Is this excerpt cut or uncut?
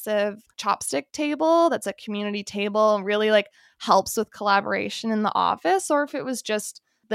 uncut